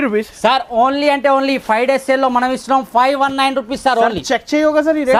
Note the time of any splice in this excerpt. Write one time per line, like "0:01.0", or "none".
none

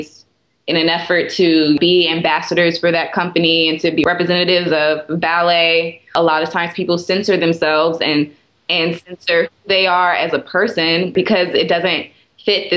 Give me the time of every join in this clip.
0:01.8
0:04.0

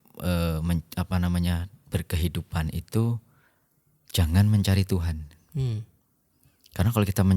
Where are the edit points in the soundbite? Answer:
none

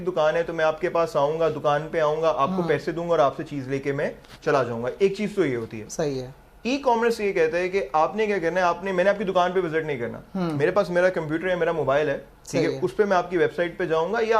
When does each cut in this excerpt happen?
none

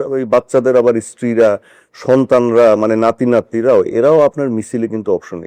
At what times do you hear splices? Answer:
none

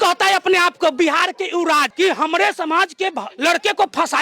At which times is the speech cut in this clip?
0:01.9

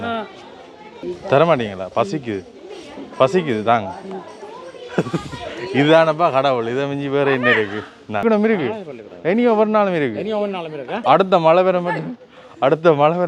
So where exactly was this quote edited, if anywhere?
0:01.0
0:08.2

